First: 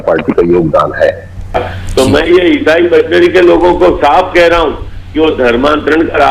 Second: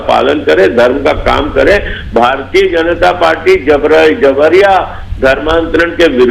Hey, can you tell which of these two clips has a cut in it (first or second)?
first